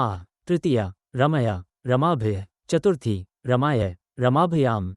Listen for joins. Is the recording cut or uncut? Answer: cut